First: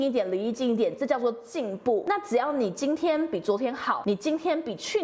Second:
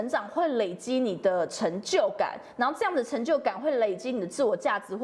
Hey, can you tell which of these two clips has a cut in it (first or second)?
first